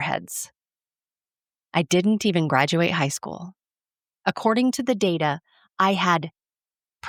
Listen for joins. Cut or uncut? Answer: uncut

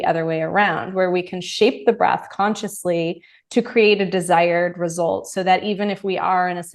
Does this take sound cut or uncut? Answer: uncut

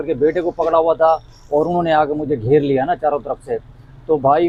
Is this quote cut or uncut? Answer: uncut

